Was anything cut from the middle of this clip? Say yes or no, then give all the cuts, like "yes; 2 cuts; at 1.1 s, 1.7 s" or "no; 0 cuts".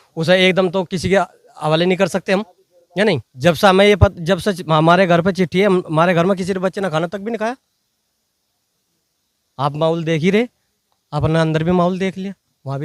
yes; 1 cut; at 3.3 s